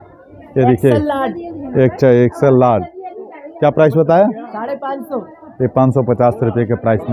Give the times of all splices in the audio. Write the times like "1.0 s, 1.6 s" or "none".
none